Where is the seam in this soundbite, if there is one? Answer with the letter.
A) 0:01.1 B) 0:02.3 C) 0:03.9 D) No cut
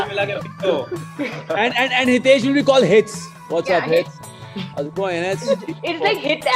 D